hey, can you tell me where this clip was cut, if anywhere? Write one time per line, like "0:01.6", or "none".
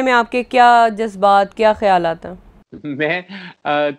none